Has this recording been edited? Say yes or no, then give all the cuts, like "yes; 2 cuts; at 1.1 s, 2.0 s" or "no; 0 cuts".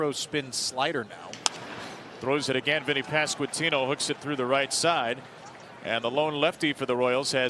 no; 0 cuts